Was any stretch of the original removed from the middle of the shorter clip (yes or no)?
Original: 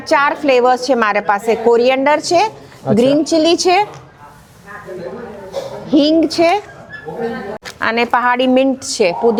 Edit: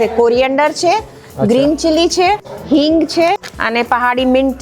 yes